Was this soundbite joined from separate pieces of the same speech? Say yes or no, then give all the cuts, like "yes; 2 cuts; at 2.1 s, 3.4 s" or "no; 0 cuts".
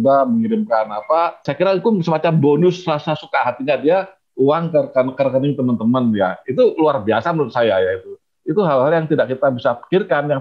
yes; 1 cut; at 1.5 s